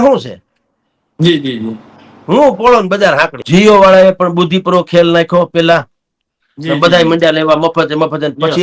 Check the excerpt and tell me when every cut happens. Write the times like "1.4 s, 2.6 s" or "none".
3.4 s